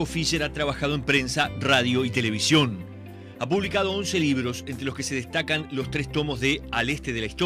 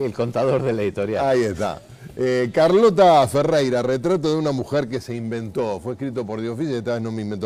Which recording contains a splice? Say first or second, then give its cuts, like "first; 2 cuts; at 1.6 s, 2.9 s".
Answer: first; 1 cut; at 2.2 s